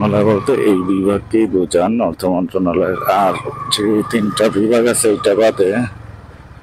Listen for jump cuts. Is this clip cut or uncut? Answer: uncut